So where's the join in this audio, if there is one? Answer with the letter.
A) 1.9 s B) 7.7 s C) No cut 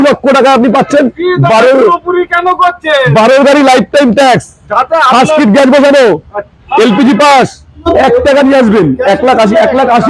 B